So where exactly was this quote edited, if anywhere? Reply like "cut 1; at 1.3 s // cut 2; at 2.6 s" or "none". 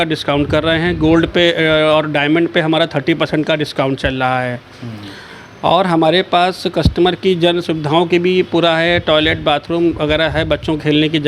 none